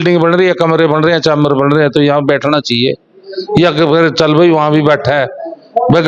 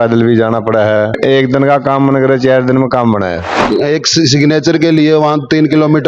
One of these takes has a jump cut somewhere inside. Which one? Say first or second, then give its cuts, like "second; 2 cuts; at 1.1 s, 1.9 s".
second; 2 cuts; at 1.2 s, 3.6 s